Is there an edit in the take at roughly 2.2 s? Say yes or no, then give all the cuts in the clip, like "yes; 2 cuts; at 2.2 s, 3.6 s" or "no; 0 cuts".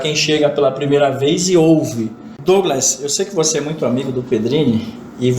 yes; 1 cut; at 2.2 s